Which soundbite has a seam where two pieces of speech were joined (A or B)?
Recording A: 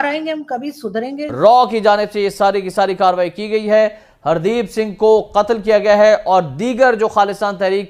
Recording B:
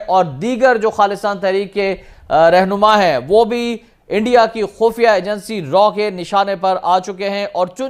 A